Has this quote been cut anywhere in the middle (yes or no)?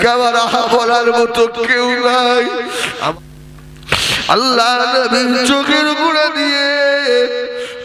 yes